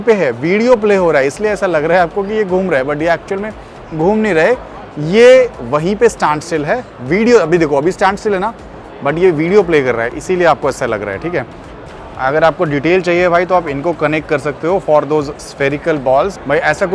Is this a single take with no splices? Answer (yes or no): yes